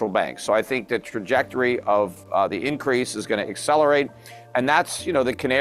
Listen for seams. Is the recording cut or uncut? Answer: uncut